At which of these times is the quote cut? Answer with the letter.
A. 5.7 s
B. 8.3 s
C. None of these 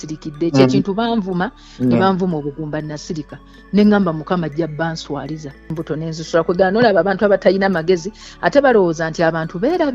A